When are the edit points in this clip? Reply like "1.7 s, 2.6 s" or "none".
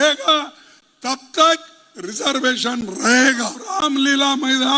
3.6 s